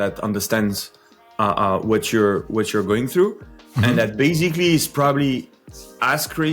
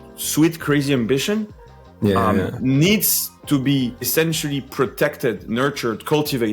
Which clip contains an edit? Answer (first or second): second